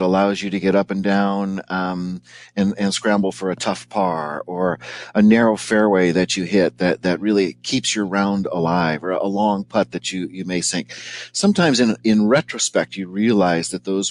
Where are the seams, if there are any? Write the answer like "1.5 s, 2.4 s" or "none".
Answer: none